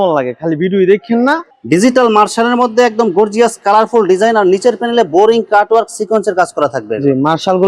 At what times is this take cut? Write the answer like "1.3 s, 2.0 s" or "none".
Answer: 1.5 s